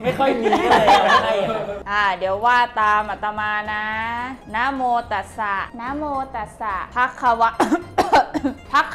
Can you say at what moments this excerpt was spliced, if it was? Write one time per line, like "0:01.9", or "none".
0:01.8